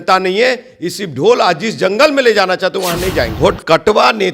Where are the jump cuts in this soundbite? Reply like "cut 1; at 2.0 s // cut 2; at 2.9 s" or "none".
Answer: cut 1; at 3.3 s